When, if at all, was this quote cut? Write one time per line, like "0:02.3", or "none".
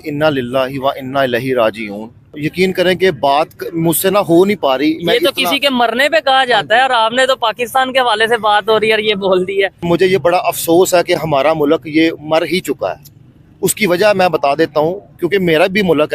0:02.4
0:09.8